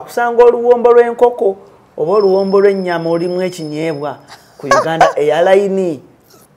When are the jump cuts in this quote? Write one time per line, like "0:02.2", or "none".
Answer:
none